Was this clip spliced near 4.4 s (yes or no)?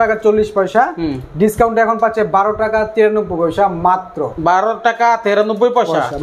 no